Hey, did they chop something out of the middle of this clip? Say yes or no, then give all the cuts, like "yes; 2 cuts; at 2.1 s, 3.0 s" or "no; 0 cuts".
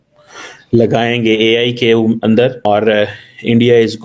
yes; 1 cut; at 2.7 s